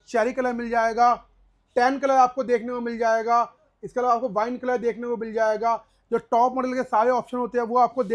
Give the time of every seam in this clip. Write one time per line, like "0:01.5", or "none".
none